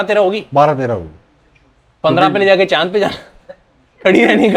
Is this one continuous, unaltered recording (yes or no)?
yes